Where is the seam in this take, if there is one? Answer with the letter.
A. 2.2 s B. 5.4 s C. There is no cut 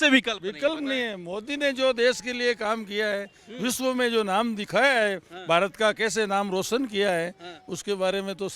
C